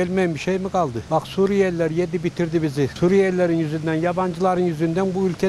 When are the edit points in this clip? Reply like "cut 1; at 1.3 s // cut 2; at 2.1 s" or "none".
cut 1; at 1.0 s // cut 2; at 2.9 s